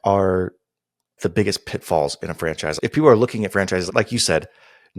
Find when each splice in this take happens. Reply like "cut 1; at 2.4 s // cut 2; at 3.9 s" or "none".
cut 1; at 1.1 s // cut 2; at 2.8 s